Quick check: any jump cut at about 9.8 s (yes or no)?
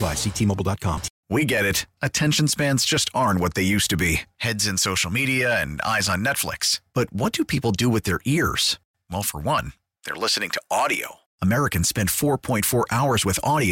no